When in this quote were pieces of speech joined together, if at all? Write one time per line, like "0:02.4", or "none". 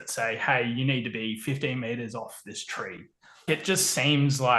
0:03.4